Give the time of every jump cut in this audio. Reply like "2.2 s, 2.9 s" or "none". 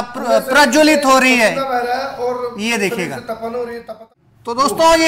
4.0 s